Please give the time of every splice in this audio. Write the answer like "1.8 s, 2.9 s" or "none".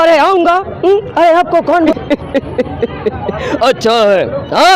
1.9 s